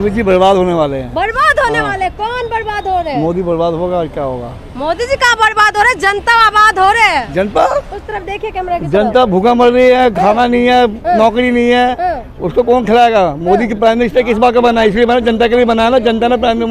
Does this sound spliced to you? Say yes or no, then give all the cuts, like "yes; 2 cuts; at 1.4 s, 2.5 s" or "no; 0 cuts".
no; 0 cuts